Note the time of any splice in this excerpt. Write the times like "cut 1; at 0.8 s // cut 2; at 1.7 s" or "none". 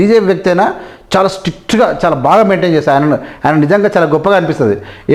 none

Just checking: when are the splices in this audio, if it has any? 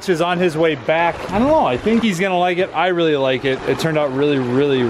cut 1; at 1.2 s

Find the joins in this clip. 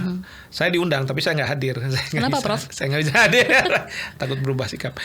none

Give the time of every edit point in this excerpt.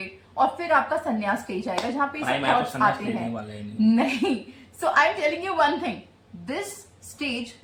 none

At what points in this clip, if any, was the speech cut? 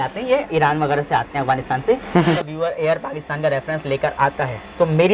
cut 1; at 2.4 s

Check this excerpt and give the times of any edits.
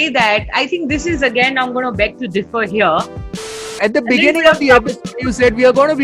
cut 1; at 3.5 s

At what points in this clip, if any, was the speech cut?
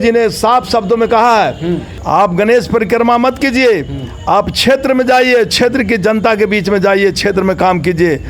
cut 1; at 1.9 s

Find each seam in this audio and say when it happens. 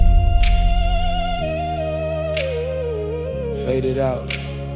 cut 1; at 2.5 s

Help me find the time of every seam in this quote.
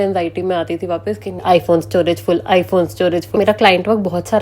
cut 1; at 1.4 s // cut 2; at 3.3 s

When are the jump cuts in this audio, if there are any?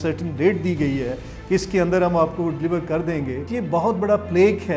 cut 1; at 3.5 s

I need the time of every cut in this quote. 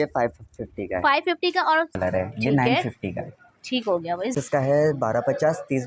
cut 1; at 1.9 s // cut 2; at 4.3 s

